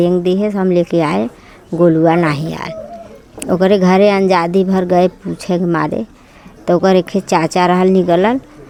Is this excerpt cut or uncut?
uncut